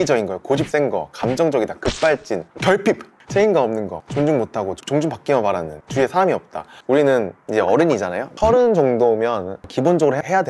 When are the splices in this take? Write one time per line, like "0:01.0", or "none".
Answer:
0:03.1
0:04.0
0:05.8
0:06.7
0:07.4